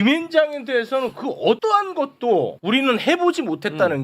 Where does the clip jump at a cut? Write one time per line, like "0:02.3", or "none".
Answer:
0:01.6
0:02.6